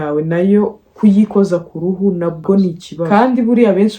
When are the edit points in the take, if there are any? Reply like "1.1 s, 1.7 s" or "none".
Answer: 3.1 s